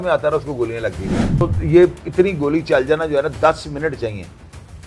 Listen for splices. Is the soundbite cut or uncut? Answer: cut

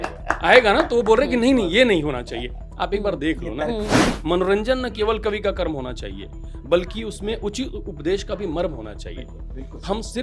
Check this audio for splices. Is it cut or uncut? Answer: cut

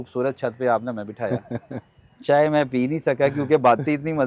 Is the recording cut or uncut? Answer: uncut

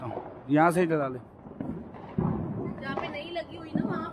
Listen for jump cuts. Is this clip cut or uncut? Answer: uncut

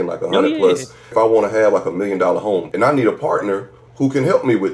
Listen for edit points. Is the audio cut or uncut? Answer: cut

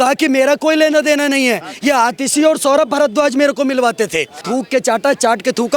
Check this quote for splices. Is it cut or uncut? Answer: cut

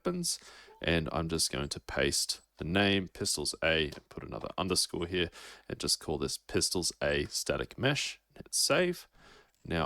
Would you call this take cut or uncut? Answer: cut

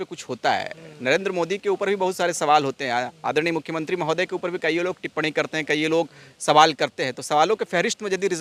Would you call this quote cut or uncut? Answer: uncut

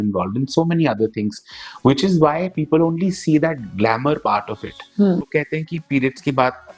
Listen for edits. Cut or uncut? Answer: cut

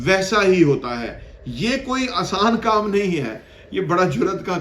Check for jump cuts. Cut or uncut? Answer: uncut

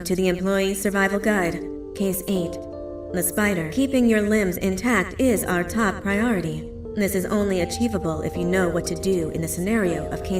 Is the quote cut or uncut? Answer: cut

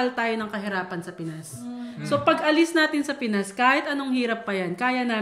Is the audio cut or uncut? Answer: uncut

